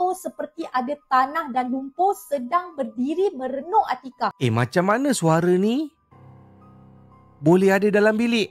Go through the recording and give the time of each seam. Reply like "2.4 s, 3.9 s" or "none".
4.3 s